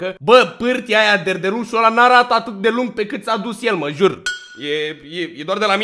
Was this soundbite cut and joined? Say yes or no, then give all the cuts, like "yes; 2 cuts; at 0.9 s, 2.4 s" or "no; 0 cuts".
no; 0 cuts